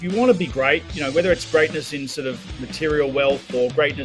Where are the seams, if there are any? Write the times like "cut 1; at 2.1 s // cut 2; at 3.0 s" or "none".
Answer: cut 1; at 0.9 s